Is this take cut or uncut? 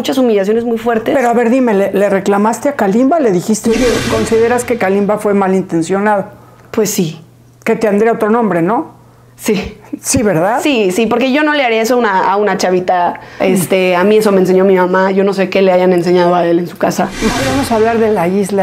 cut